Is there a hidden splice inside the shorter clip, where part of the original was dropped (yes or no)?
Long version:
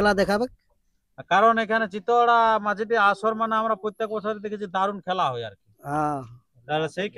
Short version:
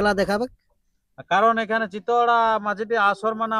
no